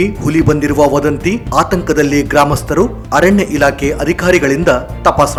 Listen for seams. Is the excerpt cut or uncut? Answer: uncut